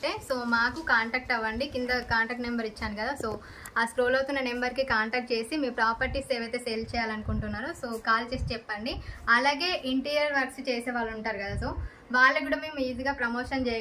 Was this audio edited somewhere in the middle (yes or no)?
no